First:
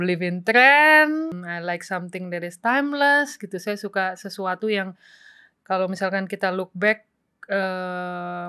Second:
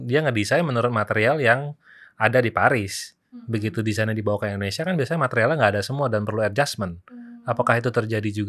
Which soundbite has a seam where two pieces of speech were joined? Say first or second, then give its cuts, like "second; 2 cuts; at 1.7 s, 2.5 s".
first; 1 cut; at 1.4 s